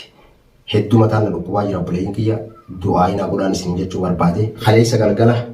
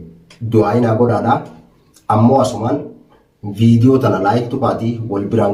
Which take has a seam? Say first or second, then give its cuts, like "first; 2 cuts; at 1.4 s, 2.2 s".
first; 1 cut; at 4.5 s